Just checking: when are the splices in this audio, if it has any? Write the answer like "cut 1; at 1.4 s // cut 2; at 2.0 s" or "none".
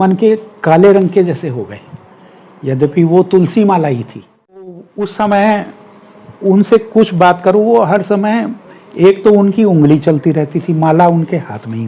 cut 1; at 4.9 s